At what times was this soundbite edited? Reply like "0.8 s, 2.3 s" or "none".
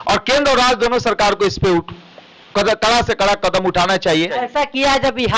4.4 s